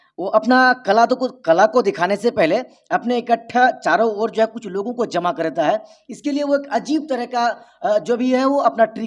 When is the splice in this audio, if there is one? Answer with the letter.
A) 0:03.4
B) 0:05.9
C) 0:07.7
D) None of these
D